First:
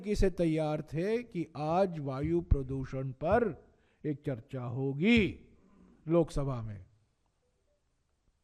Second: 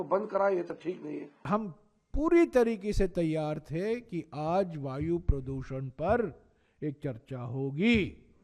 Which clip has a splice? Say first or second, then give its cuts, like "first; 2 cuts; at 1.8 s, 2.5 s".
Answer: second; 1 cut; at 1.4 s